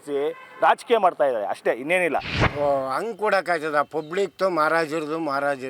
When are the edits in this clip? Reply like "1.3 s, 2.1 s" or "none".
2.4 s